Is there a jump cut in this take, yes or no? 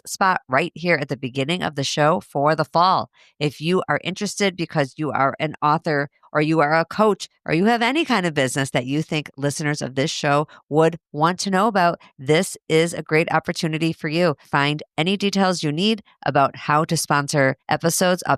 no